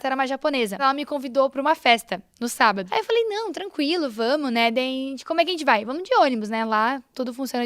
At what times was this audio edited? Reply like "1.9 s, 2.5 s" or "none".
0.8 s, 2.8 s